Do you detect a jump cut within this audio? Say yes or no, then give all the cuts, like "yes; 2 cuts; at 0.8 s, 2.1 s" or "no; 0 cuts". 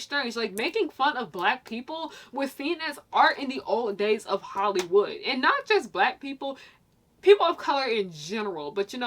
no; 0 cuts